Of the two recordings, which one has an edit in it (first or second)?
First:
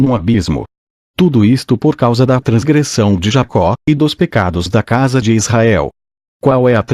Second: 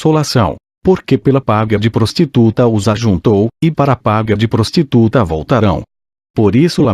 second